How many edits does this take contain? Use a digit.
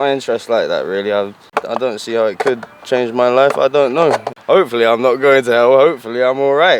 2